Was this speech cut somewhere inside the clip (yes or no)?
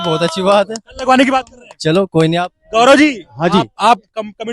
no